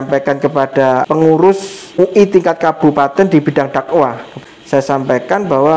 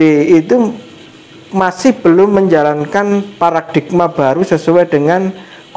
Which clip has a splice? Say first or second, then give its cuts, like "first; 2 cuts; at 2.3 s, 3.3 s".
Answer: first; 3 cuts; at 1.0 s, 2.0 s, 4.3 s